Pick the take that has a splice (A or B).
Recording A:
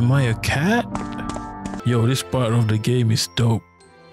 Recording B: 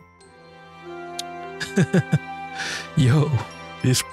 A